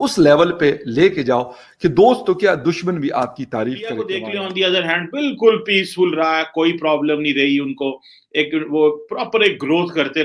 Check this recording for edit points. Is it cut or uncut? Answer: cut